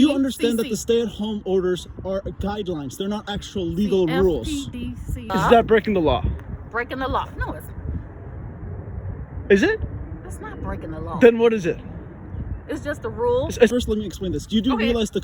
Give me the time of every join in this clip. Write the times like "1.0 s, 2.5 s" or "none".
5.2 s, 13.7 s